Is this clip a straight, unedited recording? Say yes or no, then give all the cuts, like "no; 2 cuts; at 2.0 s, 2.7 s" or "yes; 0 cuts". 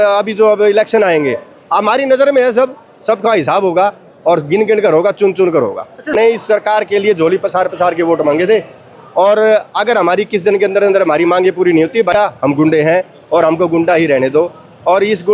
no; 2 cuts; at 6.1 s, 12.1 s